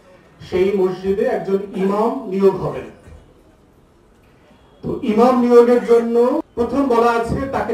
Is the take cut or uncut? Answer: cut